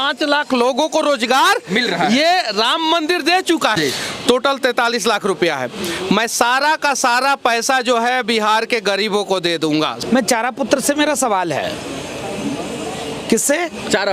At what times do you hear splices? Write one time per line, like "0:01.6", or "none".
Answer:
0:03.7
0:10.0